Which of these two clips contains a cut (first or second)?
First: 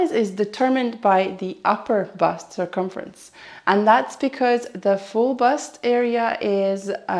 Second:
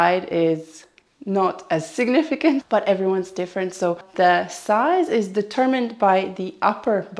second